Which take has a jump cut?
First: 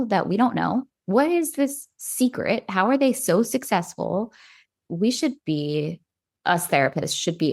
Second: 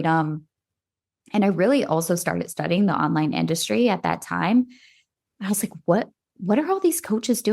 first; 1 cut; at 4.9 s

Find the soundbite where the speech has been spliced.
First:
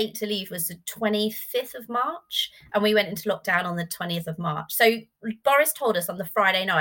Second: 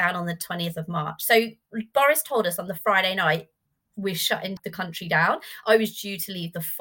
second; 1 cut; at 4.5 s

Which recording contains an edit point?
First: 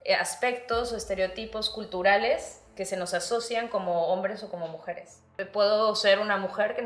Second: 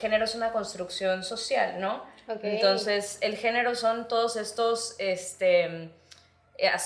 first; 1 cut; at 5.4 s

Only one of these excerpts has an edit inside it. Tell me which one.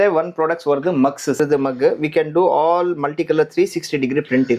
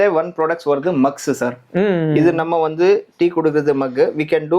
first; 1 cut; at 1.4 s

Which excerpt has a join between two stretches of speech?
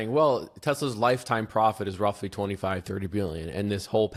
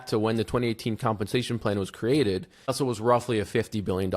second; 1 cut; at 2.7 s

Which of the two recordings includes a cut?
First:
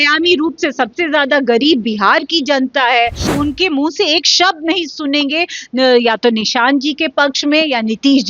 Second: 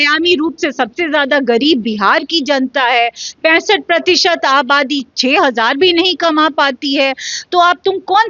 first; 1 cut; at 3.3 s

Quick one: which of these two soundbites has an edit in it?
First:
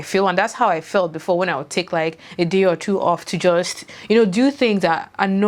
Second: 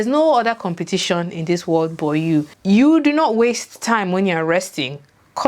second; 1 cut; at 2.5 s

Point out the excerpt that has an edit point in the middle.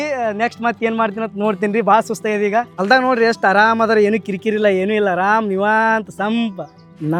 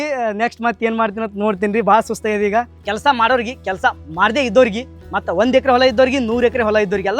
second; 1 cut; at 2.7 s

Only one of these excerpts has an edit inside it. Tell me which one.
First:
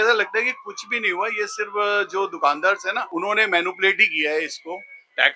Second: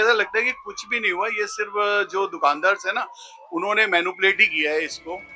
first; 1 cut; at 3.0 s

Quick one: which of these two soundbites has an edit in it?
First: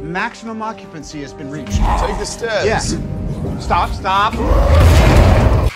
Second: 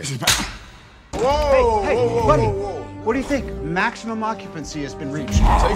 second; 1 cut; at 1.1 s

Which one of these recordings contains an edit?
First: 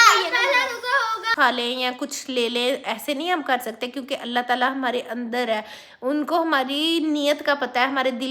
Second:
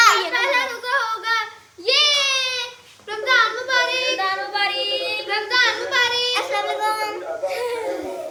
first; 1 cut; at 1.3 s

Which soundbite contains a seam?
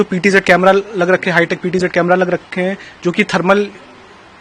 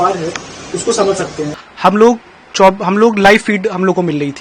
second; 1 cut; at 1.5 s

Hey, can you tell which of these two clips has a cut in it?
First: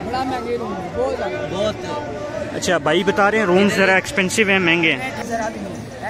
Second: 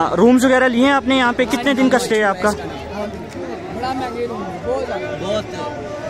first; 1 cut; at 5.2 s

